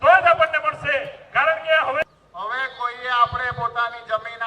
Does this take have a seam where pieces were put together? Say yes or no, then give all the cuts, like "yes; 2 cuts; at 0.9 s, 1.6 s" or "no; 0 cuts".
yes; 1 cut; at 2.0 s